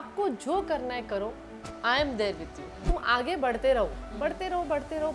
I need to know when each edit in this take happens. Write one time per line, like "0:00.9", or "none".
0:02.9